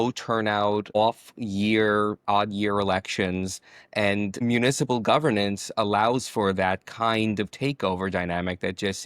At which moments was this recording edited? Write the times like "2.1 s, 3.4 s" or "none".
0.9 s, 4.4 s